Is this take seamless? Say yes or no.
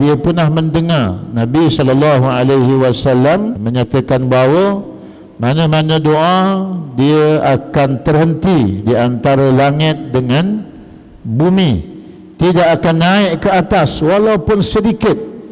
no